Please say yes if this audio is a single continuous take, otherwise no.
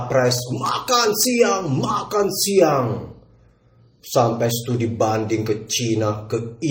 yes